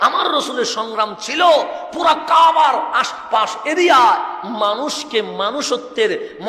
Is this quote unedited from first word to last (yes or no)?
yes